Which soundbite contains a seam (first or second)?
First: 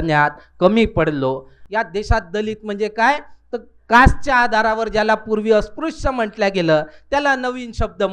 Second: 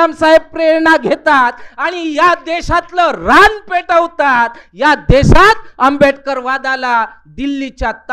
first